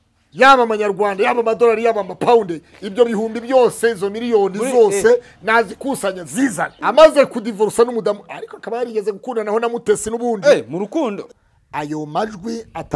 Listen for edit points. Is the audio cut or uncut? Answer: cut